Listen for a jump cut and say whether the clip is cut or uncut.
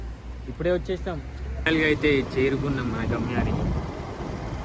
uncut